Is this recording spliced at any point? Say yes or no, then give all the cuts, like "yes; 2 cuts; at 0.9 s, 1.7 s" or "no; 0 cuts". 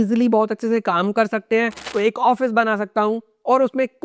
yes; 1 cut; at 1.8 s